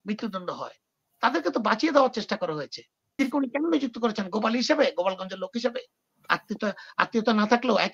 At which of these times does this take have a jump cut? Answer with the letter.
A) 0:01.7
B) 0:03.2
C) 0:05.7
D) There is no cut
B